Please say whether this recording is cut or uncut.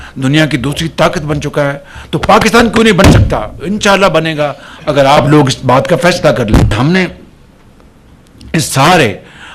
uncut